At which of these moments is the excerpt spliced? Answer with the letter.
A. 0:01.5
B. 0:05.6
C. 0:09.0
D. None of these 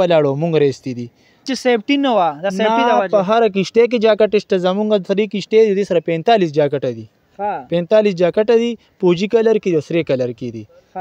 A